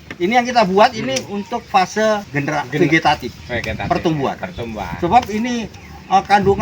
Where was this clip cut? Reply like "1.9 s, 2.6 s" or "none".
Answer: 2.3 s